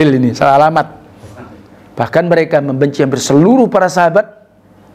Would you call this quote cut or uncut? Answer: cut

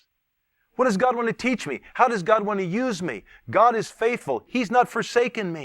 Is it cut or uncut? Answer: cut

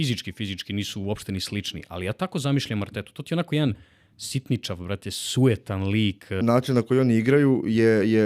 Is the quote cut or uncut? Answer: cut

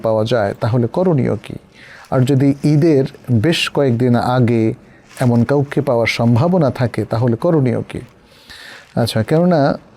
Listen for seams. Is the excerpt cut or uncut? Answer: uncut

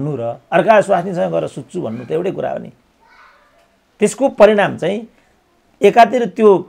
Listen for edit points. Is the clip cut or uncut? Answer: uncut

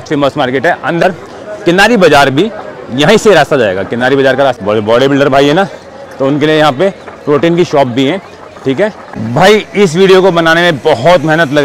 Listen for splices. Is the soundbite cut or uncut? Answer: cut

